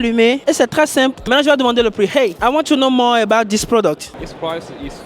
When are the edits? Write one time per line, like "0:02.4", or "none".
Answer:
0:01.3
0:02.4
0:04.1